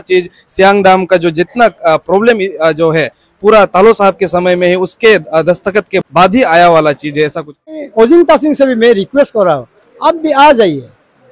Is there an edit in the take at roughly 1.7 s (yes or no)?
no